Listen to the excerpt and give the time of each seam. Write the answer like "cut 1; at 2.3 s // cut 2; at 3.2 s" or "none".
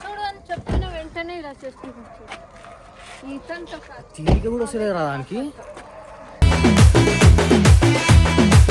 none